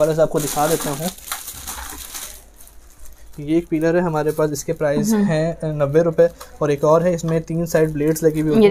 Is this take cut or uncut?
uncut